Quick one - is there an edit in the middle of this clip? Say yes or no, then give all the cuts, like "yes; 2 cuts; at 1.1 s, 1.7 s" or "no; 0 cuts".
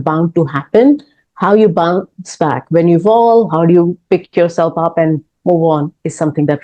no; 0 cuts